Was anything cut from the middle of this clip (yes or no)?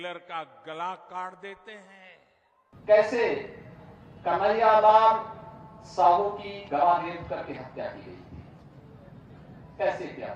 yes